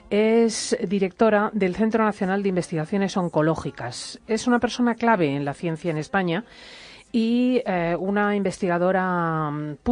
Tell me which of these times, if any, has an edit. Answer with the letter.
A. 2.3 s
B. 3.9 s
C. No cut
A